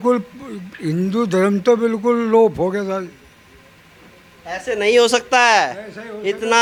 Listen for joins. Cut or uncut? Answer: uncut